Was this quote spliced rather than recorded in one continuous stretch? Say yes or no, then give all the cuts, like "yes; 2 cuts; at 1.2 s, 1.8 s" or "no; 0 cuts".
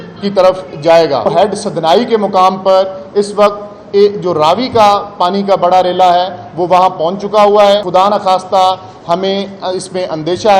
yes; 2 cuts; at 1.3 s, 7.9 s